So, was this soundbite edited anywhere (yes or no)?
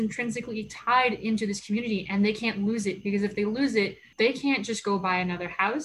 yes